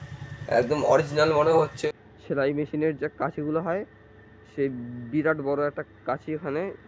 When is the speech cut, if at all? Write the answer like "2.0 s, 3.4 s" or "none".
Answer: 1.8 s